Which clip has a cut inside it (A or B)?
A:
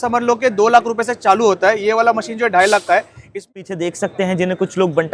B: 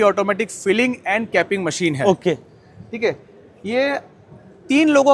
A